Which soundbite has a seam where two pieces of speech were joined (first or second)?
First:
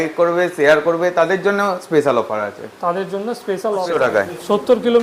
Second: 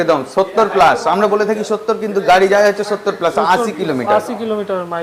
first